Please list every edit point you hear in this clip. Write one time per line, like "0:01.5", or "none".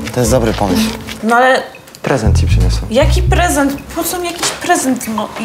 0:01.1